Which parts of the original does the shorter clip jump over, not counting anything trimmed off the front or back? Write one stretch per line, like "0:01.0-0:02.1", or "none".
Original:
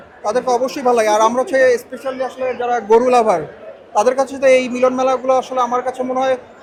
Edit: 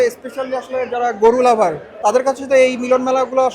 0:03.5-0:03.8